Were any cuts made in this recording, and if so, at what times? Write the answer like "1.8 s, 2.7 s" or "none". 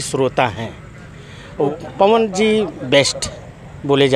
1.7 s